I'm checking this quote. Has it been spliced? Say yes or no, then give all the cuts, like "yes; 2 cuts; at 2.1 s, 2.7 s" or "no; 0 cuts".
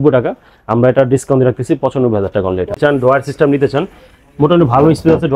yes; 1 cut; at 2.8 s